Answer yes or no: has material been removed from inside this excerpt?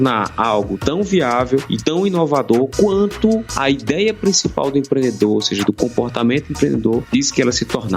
yes